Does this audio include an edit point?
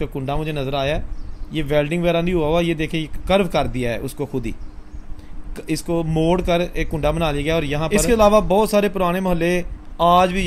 yes; 1 cut; at 7.9 s

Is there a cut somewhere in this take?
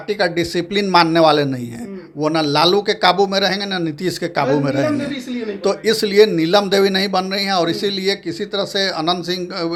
no; 0 cuts

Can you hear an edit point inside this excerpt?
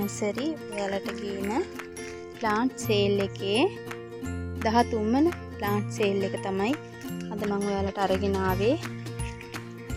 no; 0 cuts

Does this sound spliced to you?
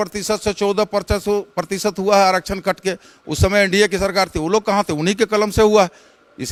no; 0 cuts

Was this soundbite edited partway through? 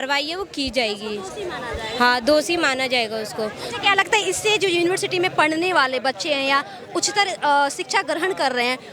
no; 0 cuts

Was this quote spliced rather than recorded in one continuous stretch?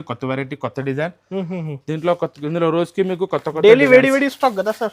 no; 0 cuts

